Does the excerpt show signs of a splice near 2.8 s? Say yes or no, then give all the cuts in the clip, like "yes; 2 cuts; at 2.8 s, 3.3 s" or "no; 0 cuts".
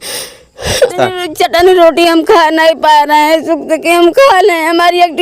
no; 1 cut; at 0.9 s